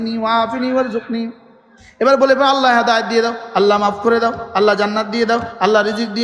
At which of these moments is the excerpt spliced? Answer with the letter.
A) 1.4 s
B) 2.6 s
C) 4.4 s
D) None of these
D